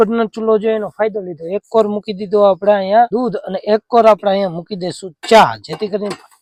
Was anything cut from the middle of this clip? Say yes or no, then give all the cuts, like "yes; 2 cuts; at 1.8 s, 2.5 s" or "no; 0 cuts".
no; 0 cuts